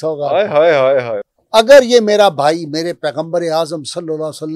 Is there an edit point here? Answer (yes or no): yes